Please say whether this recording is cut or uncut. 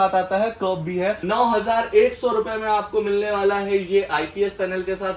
cut